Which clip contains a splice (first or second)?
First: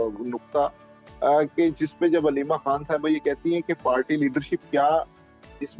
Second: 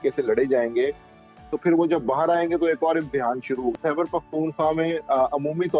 second